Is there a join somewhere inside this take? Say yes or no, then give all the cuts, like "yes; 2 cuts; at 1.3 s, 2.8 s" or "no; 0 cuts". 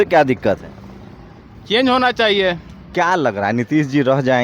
yes; 1 cut; at 2.7 s